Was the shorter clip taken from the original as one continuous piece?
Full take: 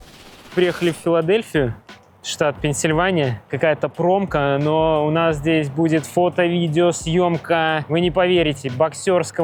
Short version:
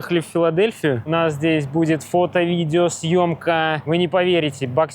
no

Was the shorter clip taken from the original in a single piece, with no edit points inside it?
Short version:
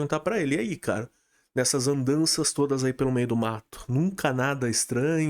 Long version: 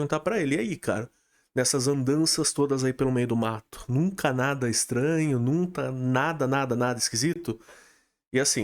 yes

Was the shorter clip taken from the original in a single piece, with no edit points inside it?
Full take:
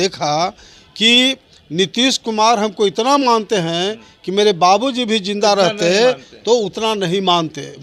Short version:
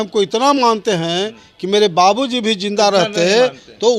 yes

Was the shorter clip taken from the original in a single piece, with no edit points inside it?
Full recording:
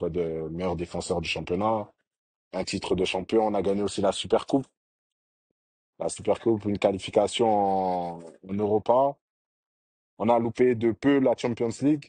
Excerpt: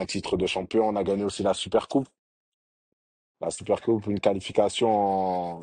yes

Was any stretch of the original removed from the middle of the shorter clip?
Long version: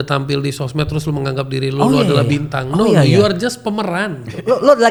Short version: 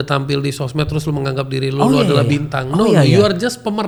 no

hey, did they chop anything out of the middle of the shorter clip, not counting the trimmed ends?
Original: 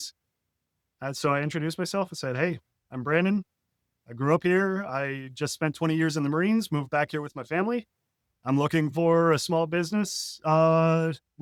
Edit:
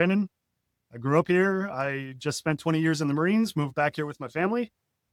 no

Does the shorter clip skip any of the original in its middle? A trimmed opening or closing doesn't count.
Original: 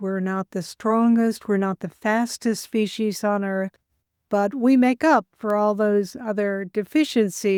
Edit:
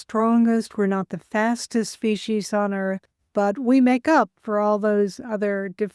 yes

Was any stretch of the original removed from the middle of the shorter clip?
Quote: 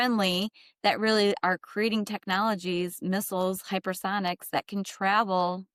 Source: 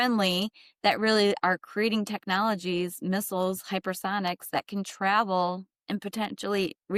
no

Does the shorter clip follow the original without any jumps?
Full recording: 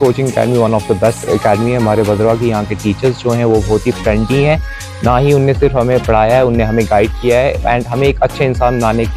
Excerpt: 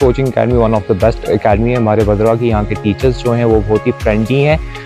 yes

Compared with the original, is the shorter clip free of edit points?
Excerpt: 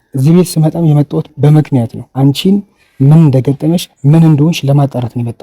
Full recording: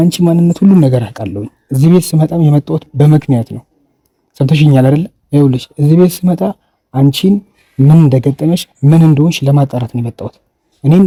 no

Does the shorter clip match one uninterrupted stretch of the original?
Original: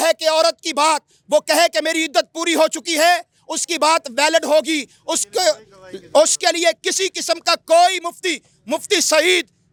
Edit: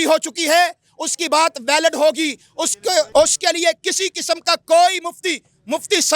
no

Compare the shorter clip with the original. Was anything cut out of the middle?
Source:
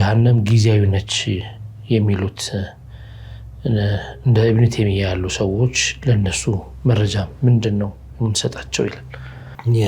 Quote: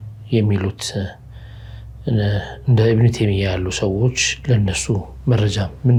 no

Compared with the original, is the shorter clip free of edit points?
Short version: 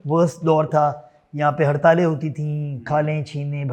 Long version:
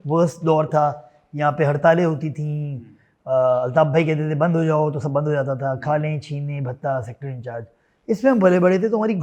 no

